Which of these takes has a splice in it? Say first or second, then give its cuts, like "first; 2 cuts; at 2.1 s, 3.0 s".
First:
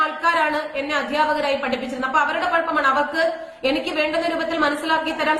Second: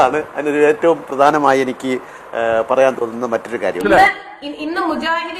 second; 1 cut; at 3.8 s